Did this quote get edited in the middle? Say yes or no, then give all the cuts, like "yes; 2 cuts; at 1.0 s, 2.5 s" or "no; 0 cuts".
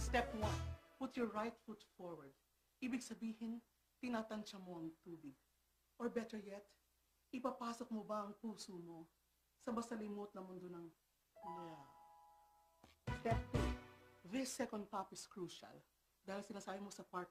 no; 0 cuts